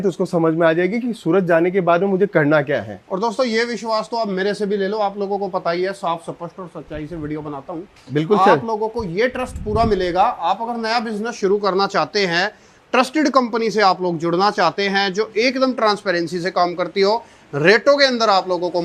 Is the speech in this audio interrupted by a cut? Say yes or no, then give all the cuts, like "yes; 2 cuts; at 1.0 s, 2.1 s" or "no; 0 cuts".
no; 0 cuts